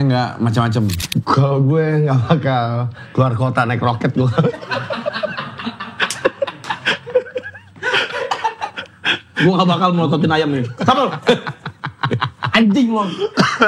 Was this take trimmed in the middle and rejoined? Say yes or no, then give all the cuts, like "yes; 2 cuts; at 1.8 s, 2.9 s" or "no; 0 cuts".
yes; 1 cut; at 1.0 s